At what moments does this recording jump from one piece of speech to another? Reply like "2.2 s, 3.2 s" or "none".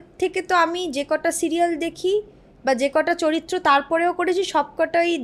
none